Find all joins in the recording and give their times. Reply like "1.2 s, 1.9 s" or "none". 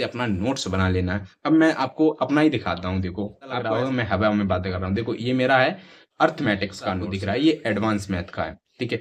3.6 s, 7.1 s